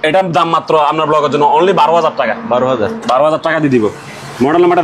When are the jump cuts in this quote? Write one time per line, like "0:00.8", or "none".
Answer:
none

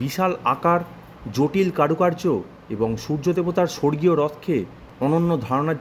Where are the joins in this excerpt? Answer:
0:04.9

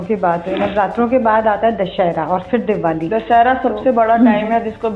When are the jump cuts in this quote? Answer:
none

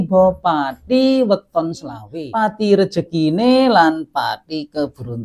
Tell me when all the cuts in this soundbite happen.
0:02.1

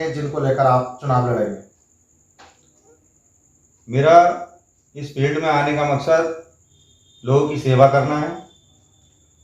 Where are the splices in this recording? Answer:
none

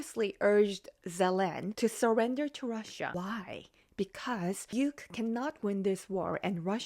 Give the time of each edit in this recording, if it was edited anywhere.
0:01.6
0:03.1
0:04.6

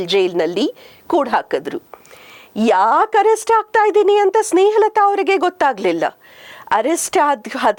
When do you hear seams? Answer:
none

